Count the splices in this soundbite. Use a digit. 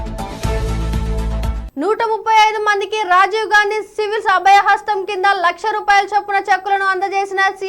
1